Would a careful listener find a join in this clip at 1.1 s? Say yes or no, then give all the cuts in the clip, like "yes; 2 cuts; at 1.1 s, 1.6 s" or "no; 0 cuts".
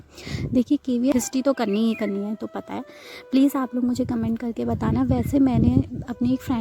yes; 1 cut; at 1.1 s